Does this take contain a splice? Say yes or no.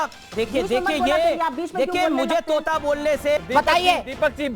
yes